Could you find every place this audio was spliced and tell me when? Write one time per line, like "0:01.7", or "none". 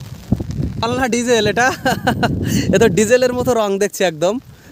none